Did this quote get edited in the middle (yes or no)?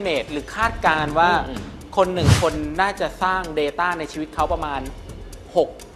no